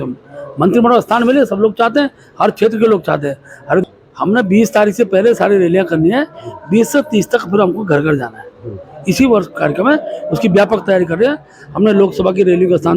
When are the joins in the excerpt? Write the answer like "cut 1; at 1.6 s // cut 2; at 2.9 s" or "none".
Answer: cut 1; at 3.8 s